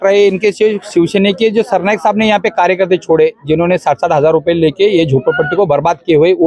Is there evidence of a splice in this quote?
no; 0 cuts

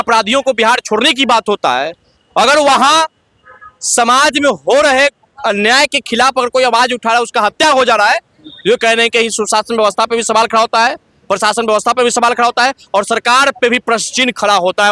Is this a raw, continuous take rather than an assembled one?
yes; 0 cuts

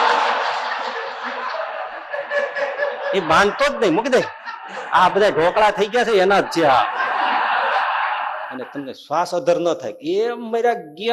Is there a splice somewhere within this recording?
yes; 1 cut; at 8.5 s

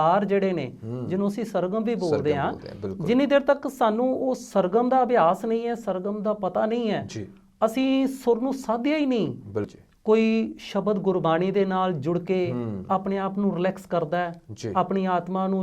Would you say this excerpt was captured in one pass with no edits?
no; 1 cut; at 9.8 s

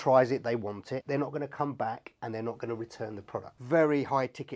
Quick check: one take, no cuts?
no; 2 cuts; at 1.0 s, 3.5 s

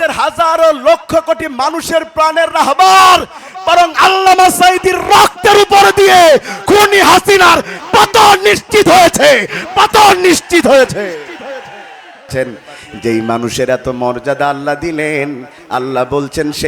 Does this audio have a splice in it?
yes; 1 cut; at 12.3 s

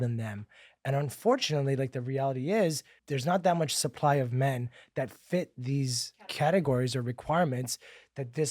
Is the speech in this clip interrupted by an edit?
yes; 1 cut; at 2.9 s

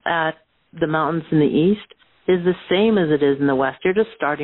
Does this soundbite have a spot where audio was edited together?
no; 0 cuts

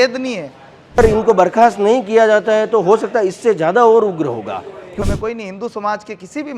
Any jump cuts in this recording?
yes; 2 cuts; at 1.0 s, 5.1 s

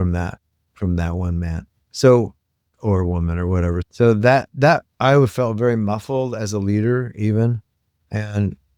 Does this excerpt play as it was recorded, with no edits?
no; 1 cut; at 3.8 s

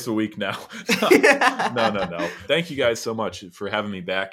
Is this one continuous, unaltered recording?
no; 1 cut; at 2.4 s

